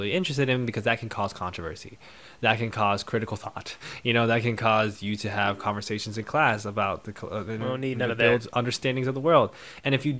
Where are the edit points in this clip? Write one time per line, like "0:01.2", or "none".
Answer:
none